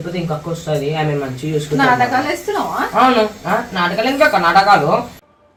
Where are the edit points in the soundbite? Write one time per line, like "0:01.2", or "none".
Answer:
none